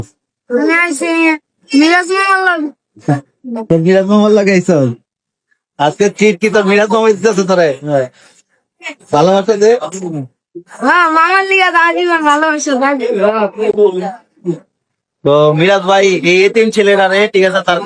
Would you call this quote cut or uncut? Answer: uncut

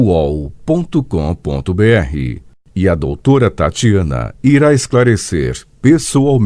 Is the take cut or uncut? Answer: cut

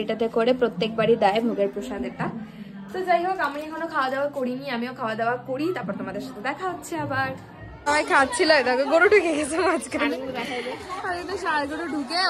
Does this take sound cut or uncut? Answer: uncut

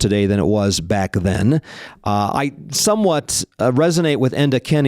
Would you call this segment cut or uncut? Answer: cut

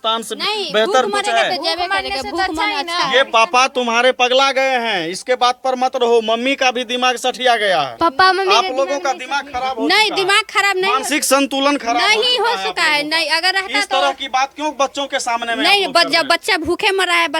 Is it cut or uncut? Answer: uncut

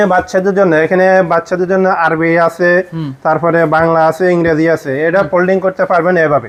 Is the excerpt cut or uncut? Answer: uncut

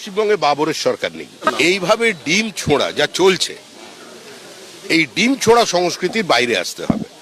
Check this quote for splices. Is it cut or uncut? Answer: cut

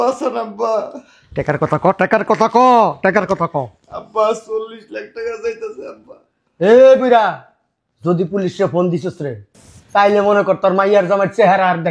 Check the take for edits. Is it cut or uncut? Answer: uncut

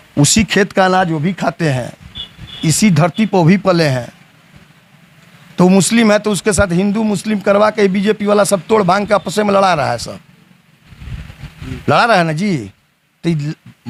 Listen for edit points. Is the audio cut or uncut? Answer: uncut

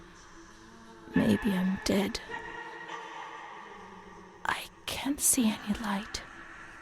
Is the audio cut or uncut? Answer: cut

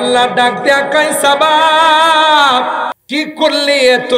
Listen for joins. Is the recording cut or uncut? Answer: cut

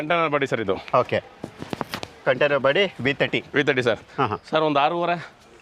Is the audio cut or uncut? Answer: uncut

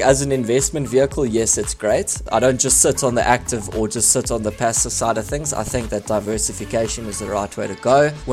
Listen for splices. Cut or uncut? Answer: cut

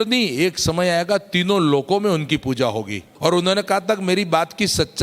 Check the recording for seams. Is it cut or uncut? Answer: cut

